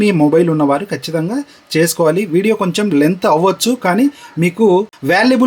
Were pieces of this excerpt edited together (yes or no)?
no